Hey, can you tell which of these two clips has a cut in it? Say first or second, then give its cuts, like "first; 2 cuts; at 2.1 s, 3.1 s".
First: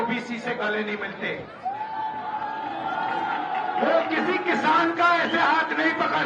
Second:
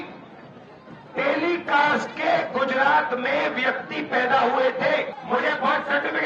second; 1 cut; at 5.2 s